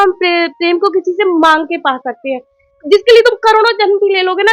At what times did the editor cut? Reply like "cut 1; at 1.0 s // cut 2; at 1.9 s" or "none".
cut 1; at 2.8 s